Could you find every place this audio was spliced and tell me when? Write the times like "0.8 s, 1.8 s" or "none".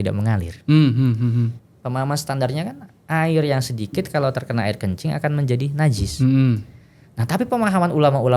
1.6 s